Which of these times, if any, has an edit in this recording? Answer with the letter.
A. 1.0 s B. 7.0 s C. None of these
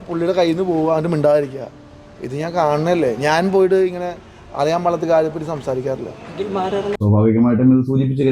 B